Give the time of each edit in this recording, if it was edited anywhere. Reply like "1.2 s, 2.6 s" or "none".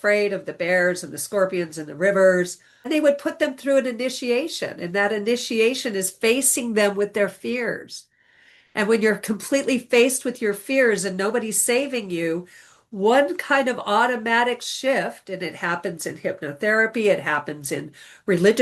2.9 s